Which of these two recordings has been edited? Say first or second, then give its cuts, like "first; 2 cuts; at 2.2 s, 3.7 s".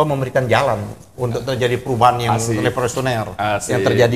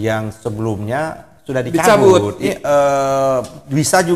second; 1 cut; at 2.4 s